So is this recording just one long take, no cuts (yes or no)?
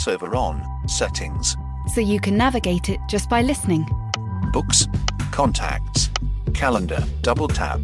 yes